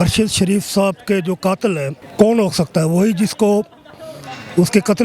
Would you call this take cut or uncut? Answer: cut